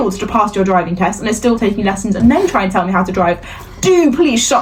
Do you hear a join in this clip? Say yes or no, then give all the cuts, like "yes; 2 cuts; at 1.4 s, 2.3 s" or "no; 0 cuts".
no; 0 cuts